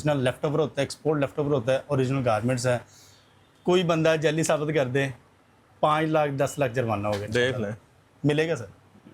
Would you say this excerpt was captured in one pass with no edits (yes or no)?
yes